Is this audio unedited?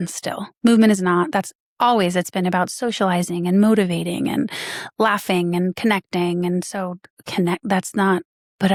yes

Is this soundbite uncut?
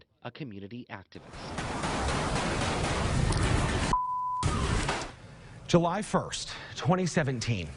no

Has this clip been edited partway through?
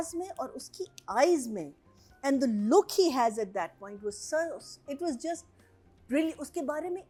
no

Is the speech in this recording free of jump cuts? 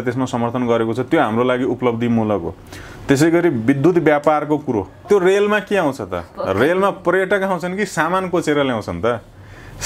no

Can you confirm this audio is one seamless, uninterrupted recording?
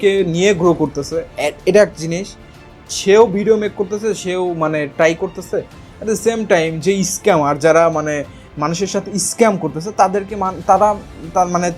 yes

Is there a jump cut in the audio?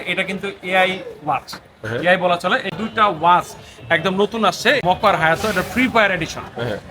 yes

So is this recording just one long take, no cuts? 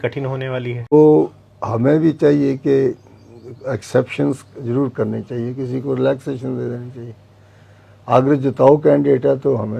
no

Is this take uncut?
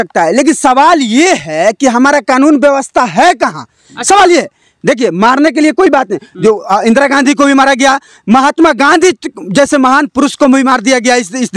yes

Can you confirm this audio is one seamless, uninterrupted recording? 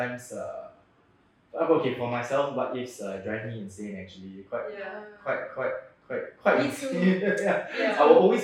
yes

